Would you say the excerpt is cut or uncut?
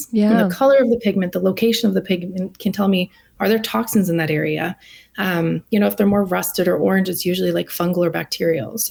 uncut